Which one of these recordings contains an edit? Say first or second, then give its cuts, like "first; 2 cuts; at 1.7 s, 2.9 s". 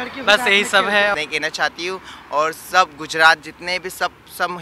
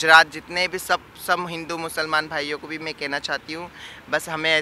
first; 1 cut; at 1.1 s